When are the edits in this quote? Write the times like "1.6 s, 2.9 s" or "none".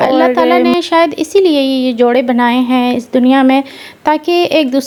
none